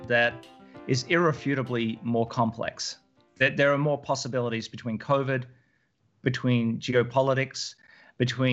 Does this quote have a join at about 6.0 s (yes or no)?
no